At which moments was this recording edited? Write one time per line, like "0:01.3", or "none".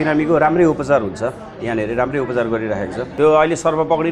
0:03.0